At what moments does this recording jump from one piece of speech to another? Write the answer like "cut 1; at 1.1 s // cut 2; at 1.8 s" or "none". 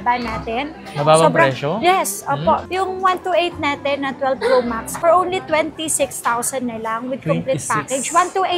none